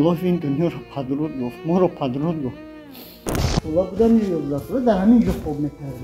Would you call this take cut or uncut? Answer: cut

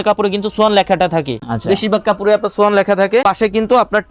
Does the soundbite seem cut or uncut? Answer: uncut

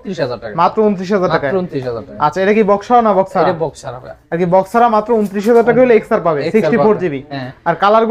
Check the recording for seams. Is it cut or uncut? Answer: uncut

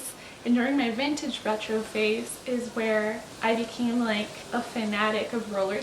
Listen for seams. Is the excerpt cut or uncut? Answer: cut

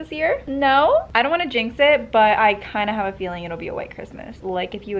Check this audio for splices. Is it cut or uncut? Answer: uncut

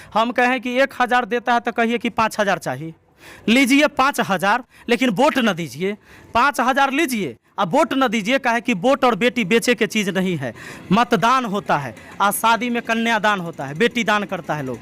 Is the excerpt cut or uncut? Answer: uncut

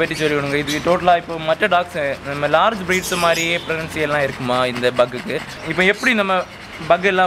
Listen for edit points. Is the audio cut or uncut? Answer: cut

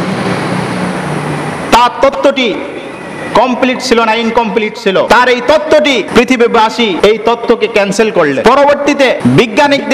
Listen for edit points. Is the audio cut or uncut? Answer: cut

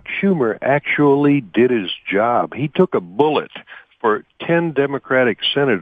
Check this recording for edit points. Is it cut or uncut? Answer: uncut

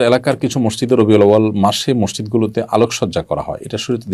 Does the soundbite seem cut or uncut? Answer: uncut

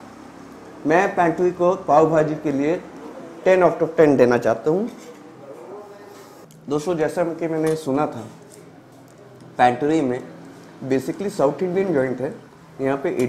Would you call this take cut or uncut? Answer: cut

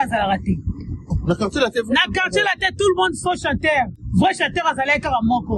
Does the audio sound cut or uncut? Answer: uncut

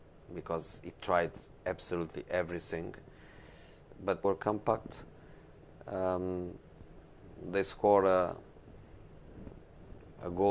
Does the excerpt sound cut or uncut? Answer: uncut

